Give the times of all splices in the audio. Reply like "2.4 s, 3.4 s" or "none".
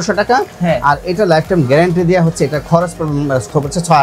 none